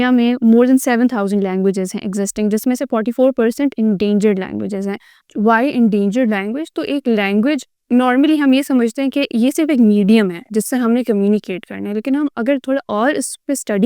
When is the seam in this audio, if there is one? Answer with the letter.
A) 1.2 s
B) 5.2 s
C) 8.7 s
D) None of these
B